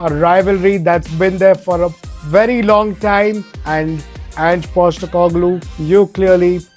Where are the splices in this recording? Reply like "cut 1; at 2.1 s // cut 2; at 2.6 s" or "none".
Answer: cut 1; at 3.5 s